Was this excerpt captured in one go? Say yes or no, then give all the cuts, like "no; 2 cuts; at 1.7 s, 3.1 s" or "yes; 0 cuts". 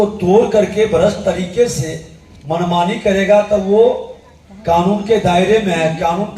yes; 0 cuts